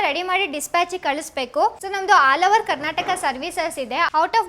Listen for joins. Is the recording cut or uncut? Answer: uncut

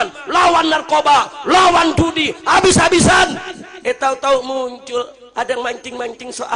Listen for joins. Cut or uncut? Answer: uncut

